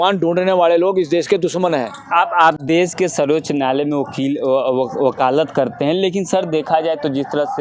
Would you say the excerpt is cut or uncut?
uncut